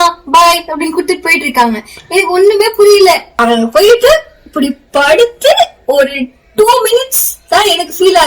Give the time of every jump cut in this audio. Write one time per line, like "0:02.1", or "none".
0:03.3